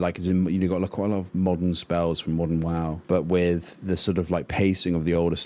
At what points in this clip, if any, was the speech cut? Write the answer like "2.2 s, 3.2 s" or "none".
3.0 s